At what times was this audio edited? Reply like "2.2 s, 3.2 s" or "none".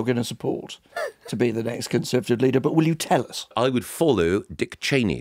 3.5 s